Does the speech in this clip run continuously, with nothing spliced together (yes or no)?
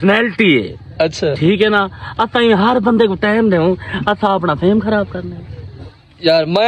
yes